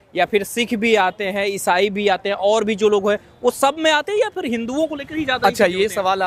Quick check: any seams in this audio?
no; 0 cuts

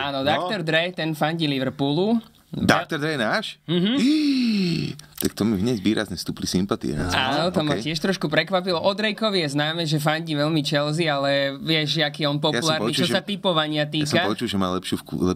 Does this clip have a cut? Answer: no; 0 cuts

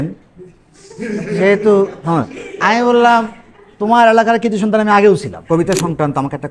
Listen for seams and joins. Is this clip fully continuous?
no; 1 cut; at 5.3 s

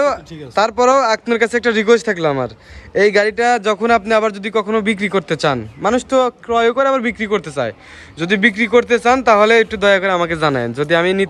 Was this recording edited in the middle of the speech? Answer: no; 0 cuts

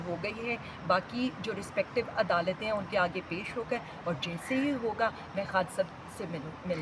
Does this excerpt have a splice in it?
no; 0 cuts

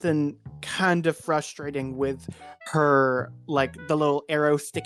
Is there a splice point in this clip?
no; 0 cuts

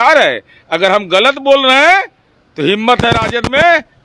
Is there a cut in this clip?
no; 0 cuts

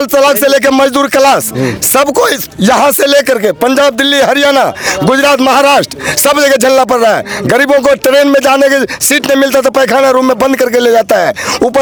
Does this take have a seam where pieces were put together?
no; 0 cuts

